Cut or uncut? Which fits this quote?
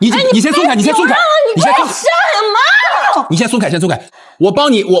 cut